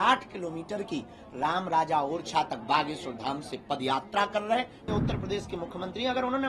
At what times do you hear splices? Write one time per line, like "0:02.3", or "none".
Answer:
0:04.8